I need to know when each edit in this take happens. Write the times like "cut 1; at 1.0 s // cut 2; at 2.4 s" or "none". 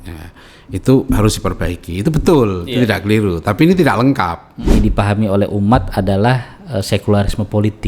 cut 1; at 4.7 s